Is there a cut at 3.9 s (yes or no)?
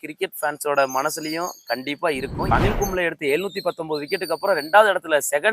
no